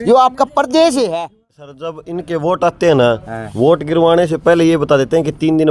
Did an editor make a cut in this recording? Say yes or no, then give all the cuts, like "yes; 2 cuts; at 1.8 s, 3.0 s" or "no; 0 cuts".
yes; 1 cut; at 1.8 s